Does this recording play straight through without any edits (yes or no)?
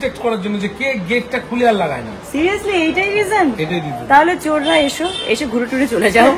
yes